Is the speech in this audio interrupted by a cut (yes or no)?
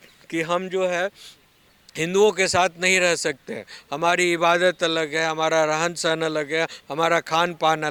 no